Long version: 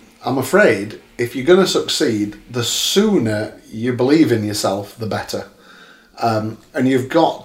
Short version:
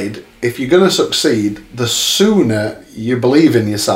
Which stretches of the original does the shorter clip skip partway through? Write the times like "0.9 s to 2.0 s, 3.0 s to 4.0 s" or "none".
none